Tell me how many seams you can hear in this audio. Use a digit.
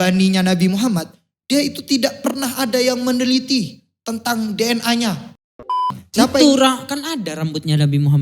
1